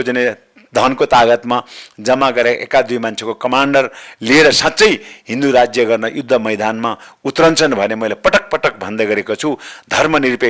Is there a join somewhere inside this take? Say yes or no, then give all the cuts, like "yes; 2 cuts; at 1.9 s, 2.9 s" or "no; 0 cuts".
no; 0 cuts